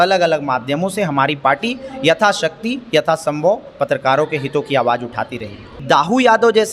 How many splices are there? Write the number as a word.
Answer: one